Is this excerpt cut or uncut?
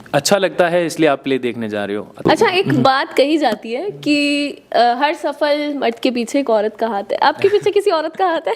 cut